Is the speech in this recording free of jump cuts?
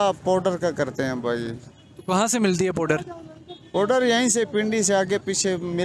yes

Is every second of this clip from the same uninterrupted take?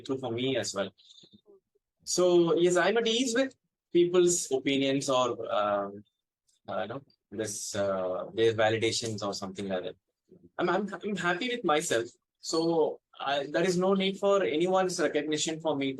yes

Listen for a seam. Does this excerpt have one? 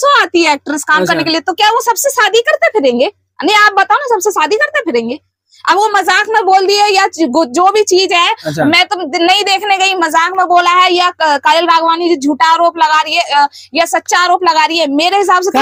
no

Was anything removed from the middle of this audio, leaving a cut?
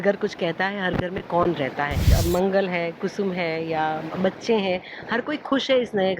yes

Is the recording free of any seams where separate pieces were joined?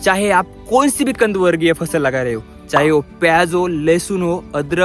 yes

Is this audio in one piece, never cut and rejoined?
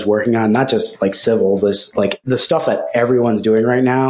no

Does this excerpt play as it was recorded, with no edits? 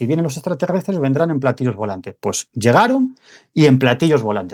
yes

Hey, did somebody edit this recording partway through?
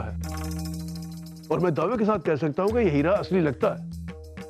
no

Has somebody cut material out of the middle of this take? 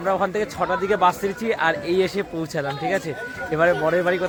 no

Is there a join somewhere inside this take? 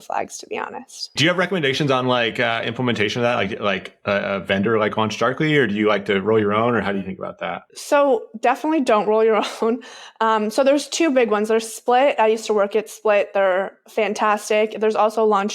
yes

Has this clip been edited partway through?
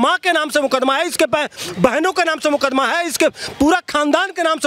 no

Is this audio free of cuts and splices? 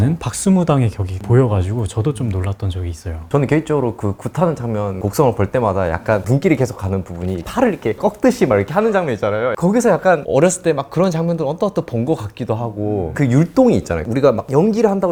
yes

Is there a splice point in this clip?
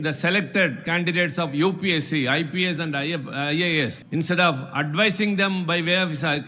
yes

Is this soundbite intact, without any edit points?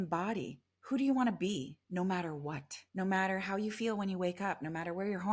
no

